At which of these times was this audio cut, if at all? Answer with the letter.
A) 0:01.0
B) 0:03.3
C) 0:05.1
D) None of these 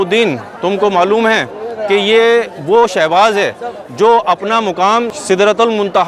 C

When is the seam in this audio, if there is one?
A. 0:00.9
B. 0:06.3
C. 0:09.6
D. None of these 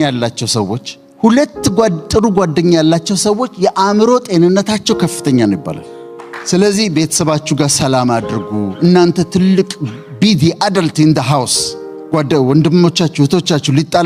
D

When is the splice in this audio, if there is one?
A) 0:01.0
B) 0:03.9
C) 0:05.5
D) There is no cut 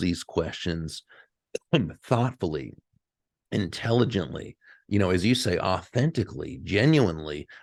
D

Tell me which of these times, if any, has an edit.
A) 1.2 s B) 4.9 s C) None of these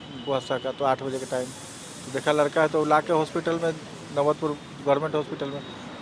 C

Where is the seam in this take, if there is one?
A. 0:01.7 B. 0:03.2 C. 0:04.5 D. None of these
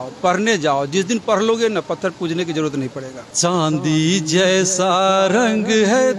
B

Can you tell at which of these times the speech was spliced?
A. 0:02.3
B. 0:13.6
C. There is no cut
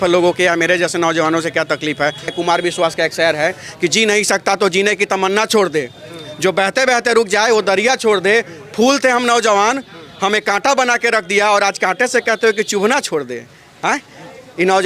A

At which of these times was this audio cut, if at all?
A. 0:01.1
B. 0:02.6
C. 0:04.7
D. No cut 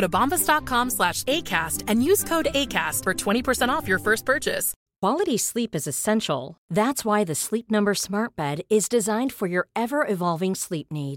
C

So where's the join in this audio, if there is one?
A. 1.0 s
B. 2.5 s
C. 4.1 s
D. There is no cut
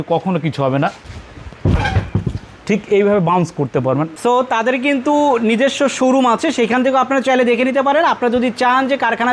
C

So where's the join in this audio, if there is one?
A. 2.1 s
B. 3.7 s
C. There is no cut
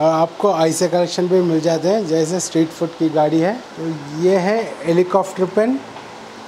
B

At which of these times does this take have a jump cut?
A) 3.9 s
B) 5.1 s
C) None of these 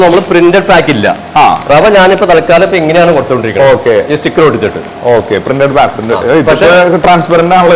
C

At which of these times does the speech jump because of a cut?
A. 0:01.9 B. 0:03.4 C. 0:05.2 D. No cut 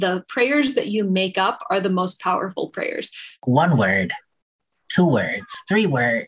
B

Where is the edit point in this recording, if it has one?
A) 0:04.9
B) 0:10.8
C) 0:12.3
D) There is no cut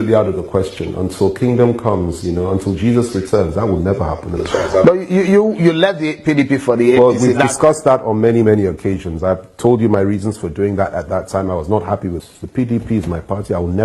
C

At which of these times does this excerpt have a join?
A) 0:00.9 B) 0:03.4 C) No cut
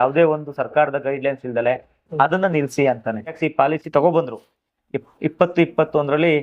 B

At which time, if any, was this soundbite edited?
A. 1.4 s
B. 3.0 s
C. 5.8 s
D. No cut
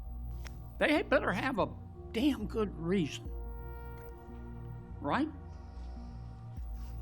C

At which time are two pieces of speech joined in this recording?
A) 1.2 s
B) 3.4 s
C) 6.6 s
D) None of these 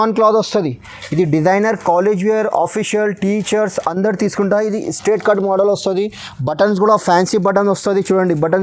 D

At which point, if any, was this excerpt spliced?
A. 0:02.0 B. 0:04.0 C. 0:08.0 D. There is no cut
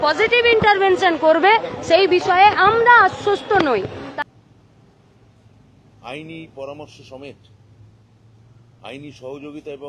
B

